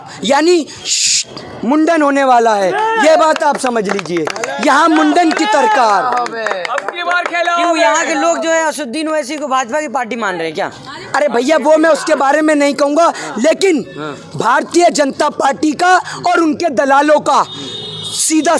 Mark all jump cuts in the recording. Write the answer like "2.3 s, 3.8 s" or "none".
none